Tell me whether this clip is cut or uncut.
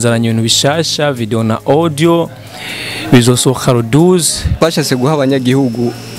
cut